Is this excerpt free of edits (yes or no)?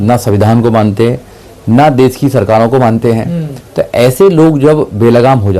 yes